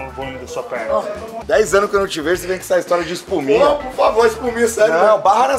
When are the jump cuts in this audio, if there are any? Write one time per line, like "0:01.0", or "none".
0:01.3